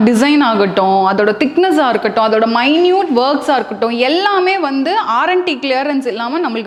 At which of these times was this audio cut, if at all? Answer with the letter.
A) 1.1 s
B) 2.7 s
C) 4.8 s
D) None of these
D